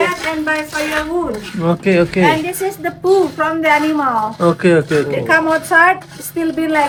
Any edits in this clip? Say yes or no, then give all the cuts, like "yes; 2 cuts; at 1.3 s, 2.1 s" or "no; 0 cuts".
no; 0 cuts